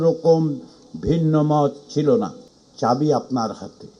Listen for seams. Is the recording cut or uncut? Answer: cut